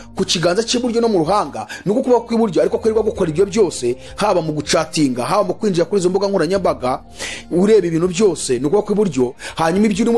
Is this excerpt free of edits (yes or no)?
yes